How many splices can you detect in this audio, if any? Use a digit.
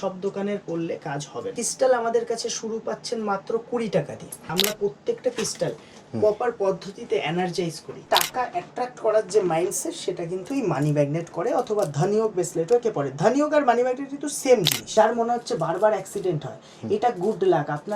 4